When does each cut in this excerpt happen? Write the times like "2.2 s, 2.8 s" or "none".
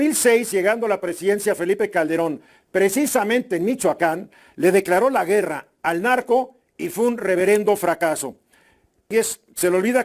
9.1 s